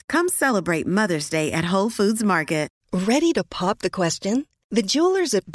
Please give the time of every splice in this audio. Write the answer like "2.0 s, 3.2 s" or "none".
2.7 s